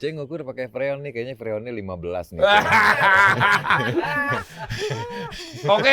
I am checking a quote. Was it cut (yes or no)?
no